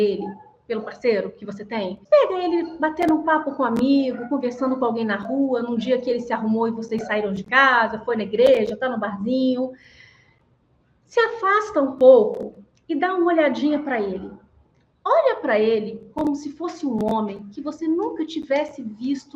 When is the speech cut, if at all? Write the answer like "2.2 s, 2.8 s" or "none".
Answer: 2.0 s